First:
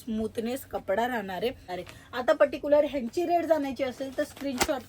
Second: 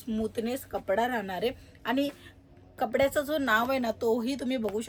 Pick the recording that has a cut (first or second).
first